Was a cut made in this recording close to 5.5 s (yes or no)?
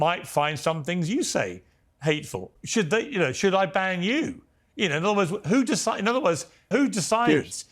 no